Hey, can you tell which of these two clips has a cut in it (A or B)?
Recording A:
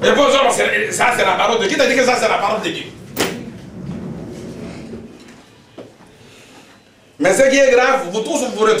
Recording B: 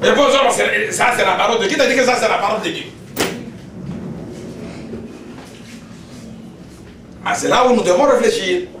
A